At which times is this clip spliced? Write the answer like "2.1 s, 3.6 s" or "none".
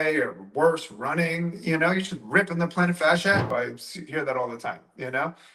3.5 s